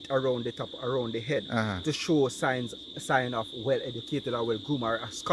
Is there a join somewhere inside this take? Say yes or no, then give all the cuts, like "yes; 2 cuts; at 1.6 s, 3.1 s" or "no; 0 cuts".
no; 0 cuts